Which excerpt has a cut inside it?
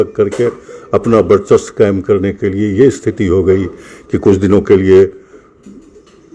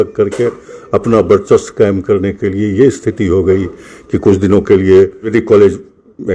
second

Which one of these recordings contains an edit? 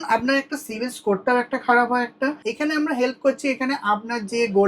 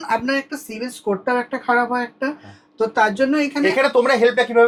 first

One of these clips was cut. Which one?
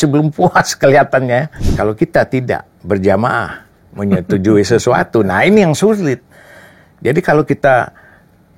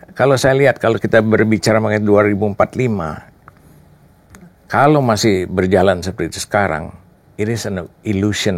first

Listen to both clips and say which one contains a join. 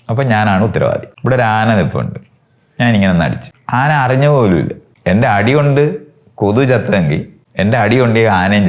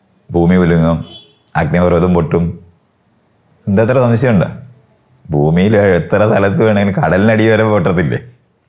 first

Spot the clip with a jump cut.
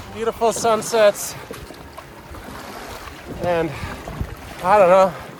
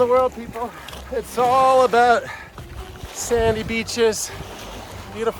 second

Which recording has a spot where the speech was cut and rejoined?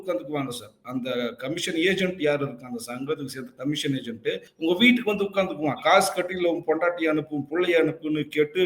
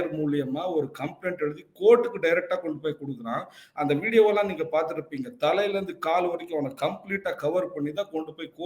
first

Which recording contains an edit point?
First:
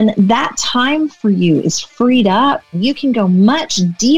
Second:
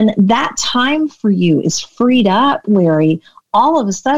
first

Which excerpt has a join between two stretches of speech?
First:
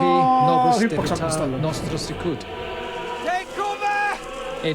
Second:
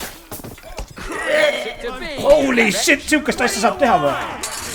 first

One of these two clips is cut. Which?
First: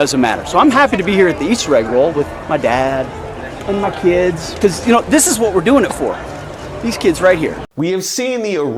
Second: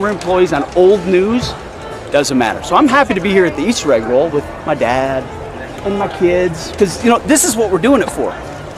first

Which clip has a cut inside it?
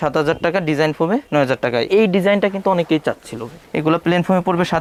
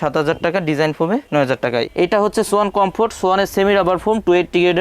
second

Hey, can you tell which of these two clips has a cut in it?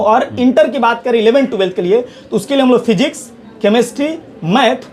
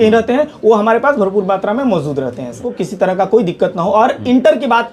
second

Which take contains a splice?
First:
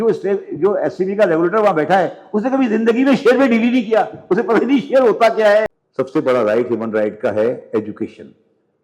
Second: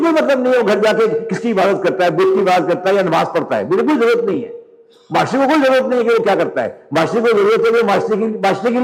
first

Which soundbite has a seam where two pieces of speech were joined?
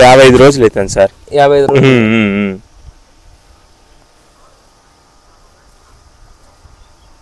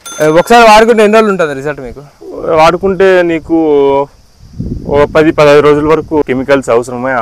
second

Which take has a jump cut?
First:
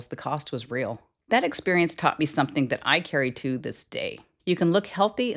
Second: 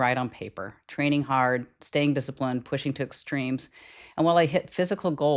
first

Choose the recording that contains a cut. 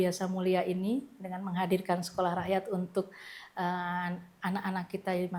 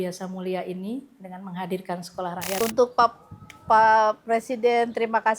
second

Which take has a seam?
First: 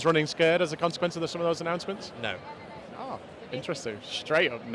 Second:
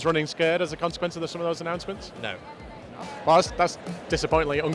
second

